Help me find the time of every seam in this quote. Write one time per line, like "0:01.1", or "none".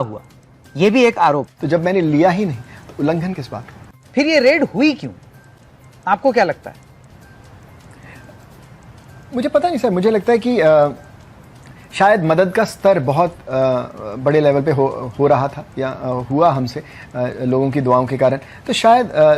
0:01.5